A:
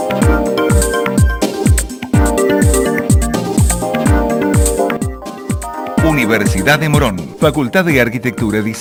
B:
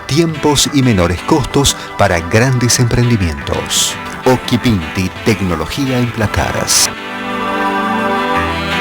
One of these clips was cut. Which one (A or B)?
B